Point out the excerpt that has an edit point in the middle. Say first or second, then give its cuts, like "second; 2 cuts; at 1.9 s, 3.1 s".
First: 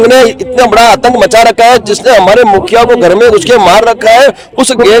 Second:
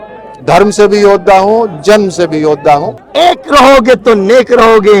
second; 1 cut; at 3.0 s